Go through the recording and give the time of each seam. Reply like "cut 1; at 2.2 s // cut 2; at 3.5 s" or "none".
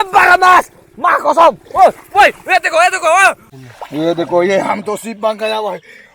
cut 1; at 3.5 s